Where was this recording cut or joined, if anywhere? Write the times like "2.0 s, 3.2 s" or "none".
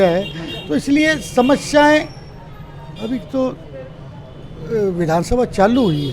none